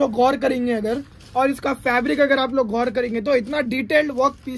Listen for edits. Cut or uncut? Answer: uncut